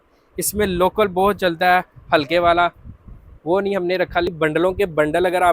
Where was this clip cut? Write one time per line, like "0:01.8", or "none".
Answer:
0:04.3